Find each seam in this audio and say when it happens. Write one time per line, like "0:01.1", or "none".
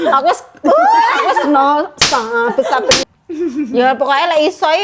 0:03.0